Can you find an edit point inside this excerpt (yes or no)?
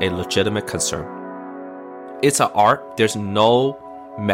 yes